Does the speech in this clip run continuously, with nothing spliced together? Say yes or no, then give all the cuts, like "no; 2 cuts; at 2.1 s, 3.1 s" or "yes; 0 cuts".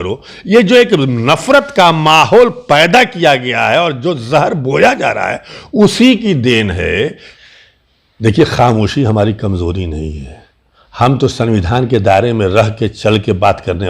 no; 1 cut; at 7.3 s